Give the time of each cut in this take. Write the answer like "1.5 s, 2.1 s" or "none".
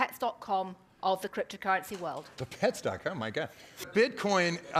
2.3 s, 3.9 s